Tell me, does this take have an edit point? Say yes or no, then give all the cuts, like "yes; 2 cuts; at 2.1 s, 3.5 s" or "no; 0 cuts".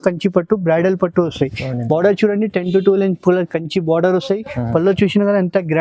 no; 0 cuts